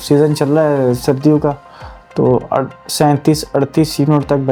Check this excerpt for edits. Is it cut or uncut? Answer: uncut